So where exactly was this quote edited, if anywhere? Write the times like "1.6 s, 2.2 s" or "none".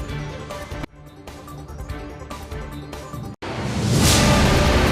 none